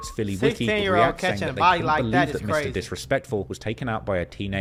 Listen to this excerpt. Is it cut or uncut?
uncut